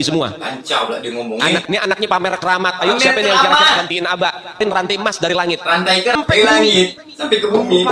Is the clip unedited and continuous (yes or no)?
no